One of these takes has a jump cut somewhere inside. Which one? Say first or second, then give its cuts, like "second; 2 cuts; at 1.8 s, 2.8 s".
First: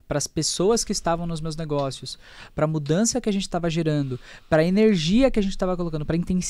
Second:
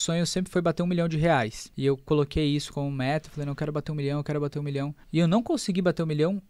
second; 2 cuts; at 1.6 s, 5.0 s